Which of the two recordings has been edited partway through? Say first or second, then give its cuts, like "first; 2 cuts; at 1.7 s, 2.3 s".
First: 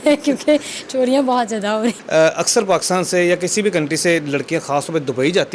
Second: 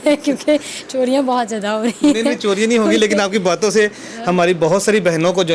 first; 1 cut; at 2.0 s